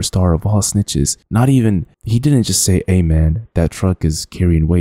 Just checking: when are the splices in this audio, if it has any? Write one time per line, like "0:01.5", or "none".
none

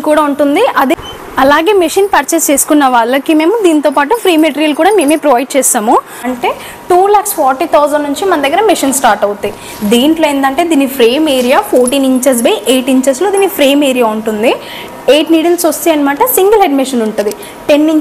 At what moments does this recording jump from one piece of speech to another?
0:01.0
0:06.2

